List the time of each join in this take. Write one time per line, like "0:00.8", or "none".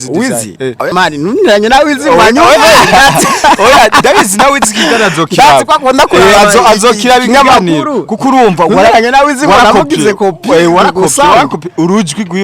0:00.9